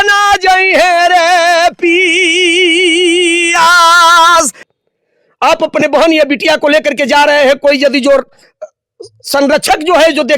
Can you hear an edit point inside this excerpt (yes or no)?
yes